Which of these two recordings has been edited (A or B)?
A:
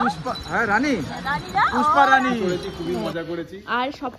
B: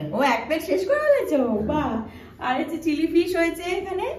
A